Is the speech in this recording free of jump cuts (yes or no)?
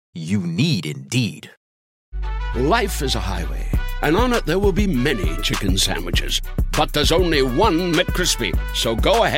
no